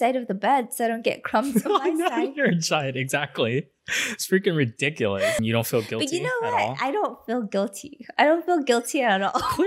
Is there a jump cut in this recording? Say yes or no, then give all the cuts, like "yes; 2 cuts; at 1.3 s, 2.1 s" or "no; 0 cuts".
yes; 1 cut; at 5.4 s